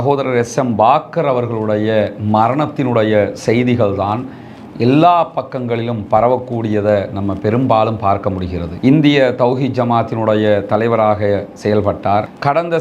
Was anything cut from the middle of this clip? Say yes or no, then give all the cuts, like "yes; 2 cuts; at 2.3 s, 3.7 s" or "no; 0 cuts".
no; 0 cuts